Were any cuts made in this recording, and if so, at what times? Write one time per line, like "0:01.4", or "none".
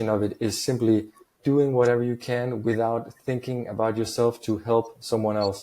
0:01.3